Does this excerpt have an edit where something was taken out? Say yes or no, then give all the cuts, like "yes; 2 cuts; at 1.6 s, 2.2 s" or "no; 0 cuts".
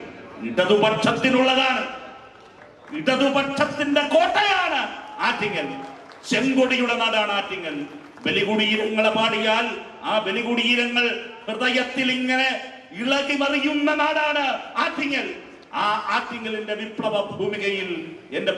no; 0 cuts